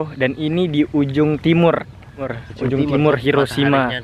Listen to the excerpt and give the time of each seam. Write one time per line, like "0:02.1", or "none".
0:02.4